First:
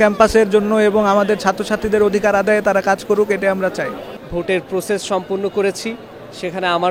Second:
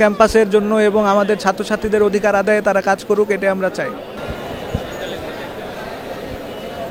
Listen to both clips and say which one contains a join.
first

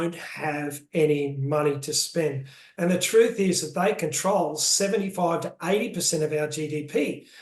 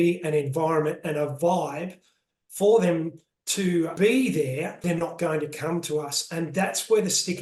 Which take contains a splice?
second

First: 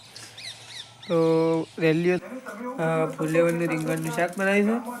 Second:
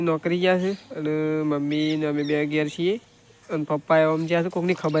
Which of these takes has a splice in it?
first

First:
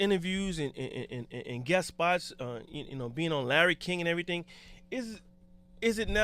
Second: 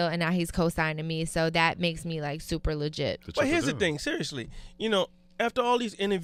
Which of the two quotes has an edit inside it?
first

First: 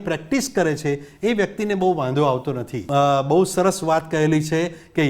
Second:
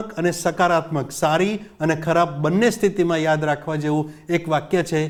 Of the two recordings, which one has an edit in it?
first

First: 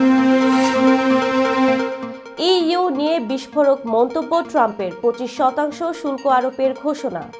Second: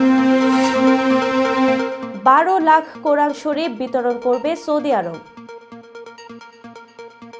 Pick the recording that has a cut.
second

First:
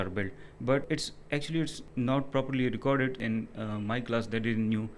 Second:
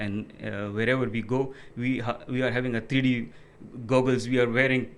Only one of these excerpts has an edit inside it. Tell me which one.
first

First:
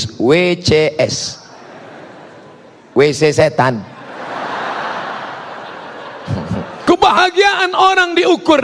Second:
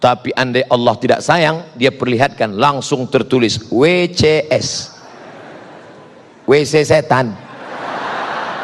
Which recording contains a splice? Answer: first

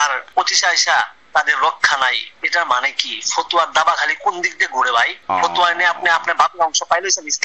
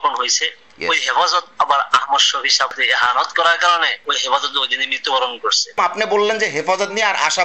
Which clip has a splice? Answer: second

